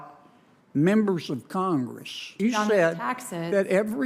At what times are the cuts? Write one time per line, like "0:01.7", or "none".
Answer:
0:02.3